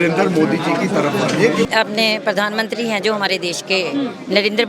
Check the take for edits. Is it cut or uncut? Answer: cut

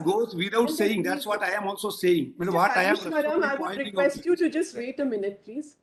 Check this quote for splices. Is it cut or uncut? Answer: uncut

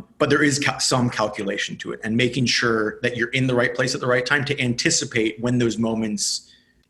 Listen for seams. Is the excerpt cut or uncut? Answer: uncut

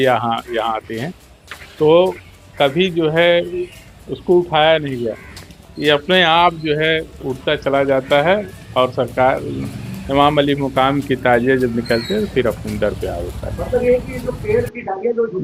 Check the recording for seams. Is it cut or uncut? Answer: uncut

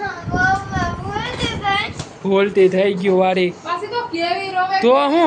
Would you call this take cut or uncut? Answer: uncut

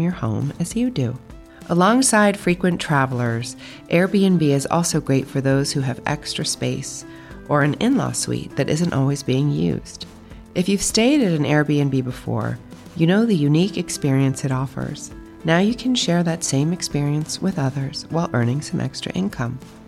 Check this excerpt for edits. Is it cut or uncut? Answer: uncut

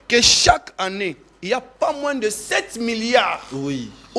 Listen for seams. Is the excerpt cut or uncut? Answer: uncut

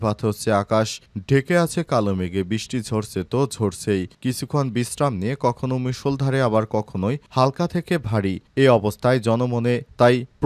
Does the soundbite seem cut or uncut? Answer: uncut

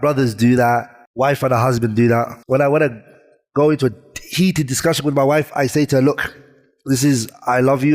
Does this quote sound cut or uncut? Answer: cut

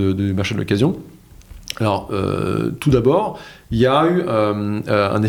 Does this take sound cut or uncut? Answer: uncut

